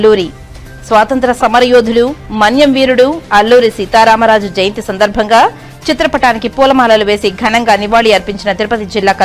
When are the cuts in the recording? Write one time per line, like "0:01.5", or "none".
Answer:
none